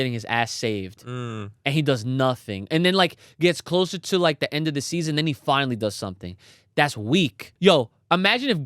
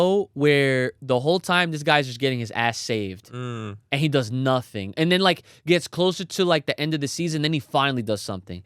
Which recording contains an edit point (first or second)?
first